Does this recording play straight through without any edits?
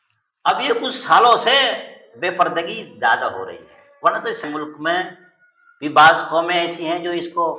no; 1 cut; at 4.4 s

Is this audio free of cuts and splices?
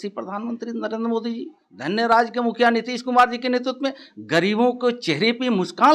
yes; 0 cuts

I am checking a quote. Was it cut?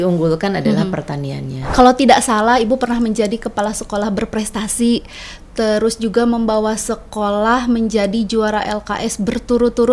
yes; 1 cut; at 1.7 s

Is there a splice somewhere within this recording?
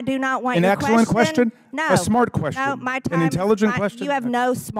no; 0 cuts

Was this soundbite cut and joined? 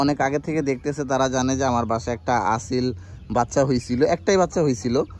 no; 0 cuts

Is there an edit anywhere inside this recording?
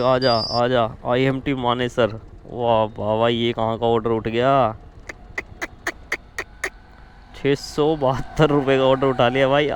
no; 0 cuts

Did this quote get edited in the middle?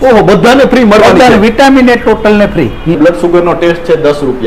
yes; 1 cut; at 2.9 s

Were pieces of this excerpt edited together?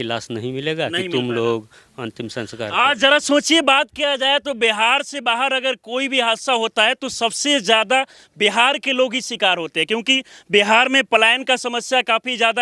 no; 0 cuts

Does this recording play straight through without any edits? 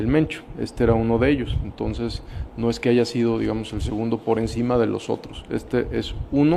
yes; 0 cuts

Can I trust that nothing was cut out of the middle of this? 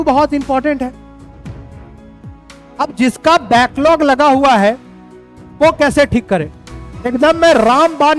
yes; 0 cuts

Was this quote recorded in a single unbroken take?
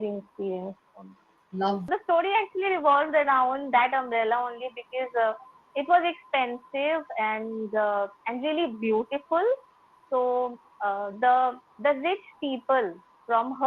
no; 1 cut; at 1.9 s

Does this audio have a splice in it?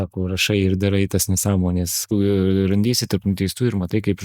yes; 1 cut; at 2.0 s

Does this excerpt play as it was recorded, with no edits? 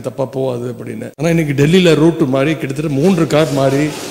no; 1 cut; at 1.1 s

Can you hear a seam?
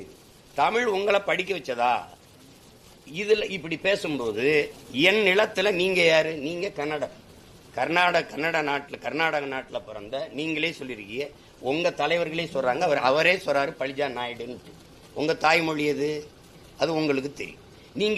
yes; 1 cut; at 4.8 s

